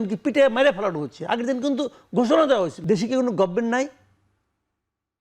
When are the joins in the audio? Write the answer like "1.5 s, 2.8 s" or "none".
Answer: 2.8 s

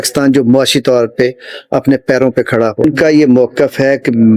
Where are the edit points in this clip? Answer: 2.8 s

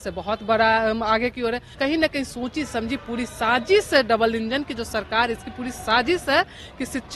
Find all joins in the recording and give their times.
1.7 s

